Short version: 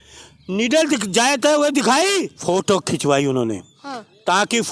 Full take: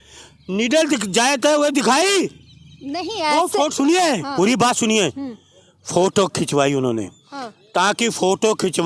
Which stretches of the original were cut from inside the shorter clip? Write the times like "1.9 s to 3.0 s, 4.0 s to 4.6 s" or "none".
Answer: 2.3 s to 5.8 s